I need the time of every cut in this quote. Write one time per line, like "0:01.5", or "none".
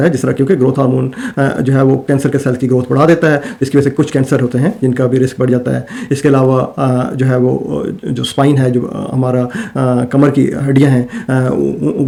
none

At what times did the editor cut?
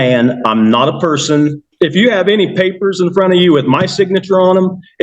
0:01.6

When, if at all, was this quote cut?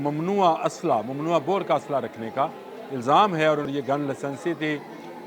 0:03.7

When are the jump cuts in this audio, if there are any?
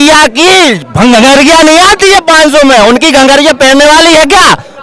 none

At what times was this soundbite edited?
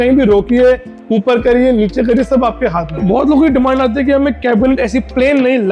0:03.0

